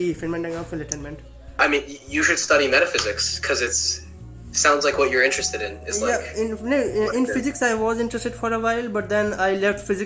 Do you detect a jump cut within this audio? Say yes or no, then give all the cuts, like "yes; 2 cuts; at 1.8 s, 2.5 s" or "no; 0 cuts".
no; 0 cuts